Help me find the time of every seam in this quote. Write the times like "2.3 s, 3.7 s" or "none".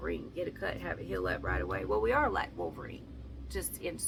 none